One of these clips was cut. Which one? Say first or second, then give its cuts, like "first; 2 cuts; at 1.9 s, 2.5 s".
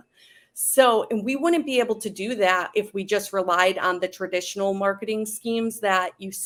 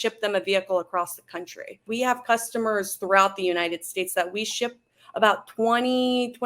second; 1 cut; at 1.8 s